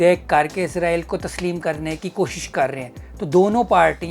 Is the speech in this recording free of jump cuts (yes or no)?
yes